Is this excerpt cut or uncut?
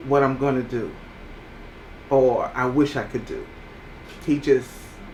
uncut